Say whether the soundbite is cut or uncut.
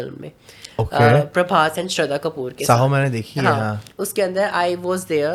uncut